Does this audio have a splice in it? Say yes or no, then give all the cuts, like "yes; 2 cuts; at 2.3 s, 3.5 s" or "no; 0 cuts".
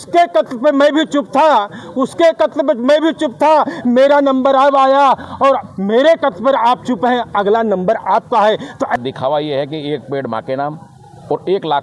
yes; 1 cut; at 9.0 s